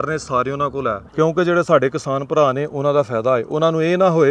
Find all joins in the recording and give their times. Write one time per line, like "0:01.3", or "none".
0:01.0